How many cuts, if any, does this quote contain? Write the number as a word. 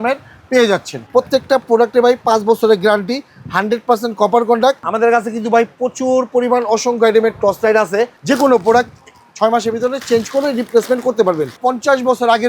four